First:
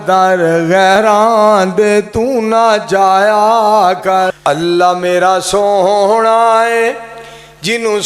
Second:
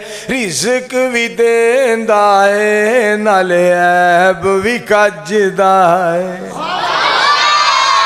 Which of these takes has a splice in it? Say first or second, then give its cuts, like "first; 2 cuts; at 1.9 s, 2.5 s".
first; 1 cut; at 4.4 s